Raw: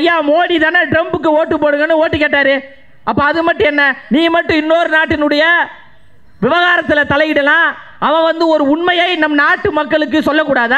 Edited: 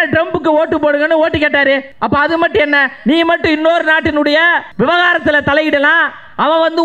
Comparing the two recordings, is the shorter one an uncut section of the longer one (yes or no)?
no